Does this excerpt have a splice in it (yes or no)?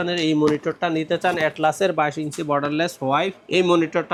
no